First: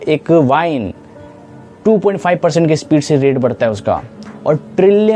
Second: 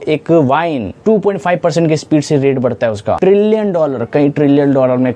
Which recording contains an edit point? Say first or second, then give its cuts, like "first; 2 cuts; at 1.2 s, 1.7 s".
second; 2 cuts; at 0.9 s, 3.2 s